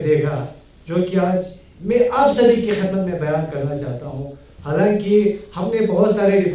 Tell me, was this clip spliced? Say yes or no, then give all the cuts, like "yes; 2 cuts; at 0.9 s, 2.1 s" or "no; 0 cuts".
no; 0 cuts